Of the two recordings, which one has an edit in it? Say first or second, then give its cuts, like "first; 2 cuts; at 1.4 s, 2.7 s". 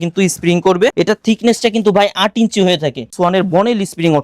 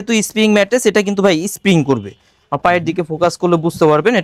first; 2 cuts; at 0.9 s, 3.1 s